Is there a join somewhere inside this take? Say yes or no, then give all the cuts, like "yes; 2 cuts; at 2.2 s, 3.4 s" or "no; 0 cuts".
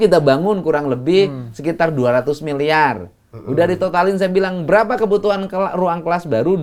no; 0 cuts